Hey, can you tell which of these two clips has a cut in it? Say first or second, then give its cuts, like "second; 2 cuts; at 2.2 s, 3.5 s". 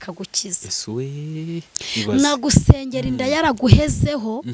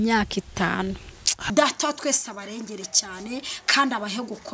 second; 1 cut; at 1.3 s